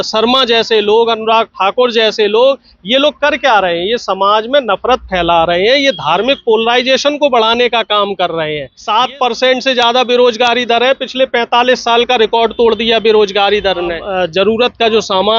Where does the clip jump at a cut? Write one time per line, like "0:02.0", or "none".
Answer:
0:08.7
0:14.0